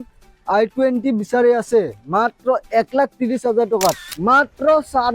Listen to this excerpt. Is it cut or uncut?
cut